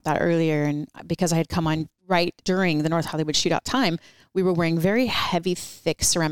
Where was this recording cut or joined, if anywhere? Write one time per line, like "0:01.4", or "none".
0:02.3

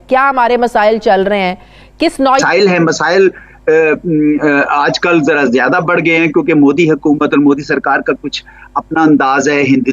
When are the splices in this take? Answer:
0:02.4

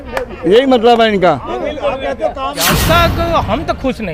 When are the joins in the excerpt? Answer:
0:02.7

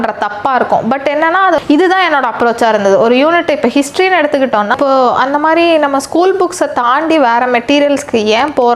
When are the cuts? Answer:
0:01.6
0:04.7

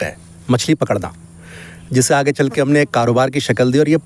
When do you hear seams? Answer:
none

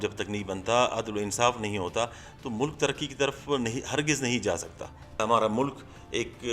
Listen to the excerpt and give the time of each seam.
0:05.2

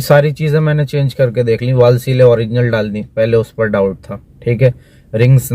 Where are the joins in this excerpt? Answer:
none

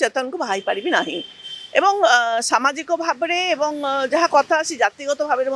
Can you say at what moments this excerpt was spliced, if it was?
none

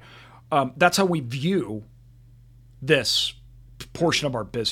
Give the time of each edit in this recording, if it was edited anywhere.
none

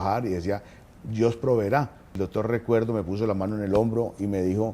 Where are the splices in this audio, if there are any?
0:02.2

